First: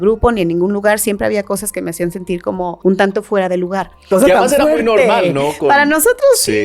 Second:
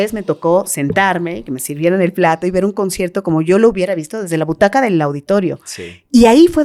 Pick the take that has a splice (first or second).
first